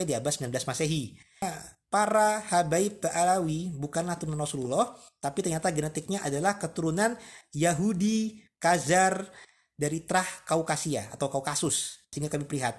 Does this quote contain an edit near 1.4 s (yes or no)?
yes